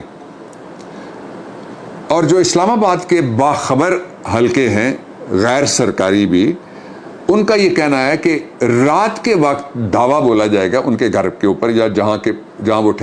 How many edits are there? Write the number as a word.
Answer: zero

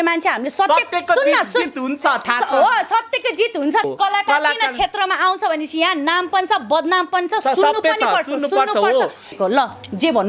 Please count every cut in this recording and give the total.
two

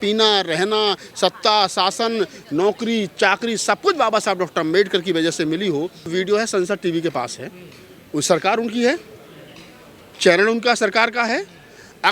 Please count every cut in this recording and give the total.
one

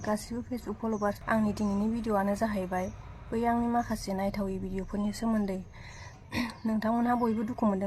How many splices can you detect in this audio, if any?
one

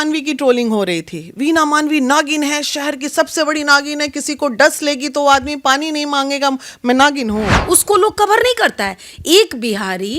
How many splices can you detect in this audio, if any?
one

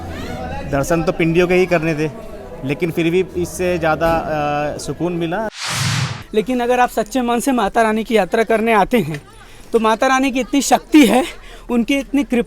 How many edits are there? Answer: one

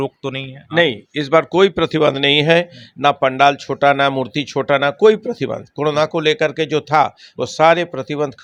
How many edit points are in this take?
zero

